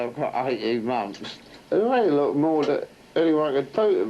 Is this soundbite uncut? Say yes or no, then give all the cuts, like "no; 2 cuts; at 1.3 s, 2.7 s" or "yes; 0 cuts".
yes; 0 cuts